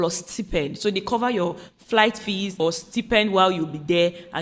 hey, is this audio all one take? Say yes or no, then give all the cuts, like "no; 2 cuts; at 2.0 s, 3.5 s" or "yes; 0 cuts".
no; 1 cut; at 2.6 s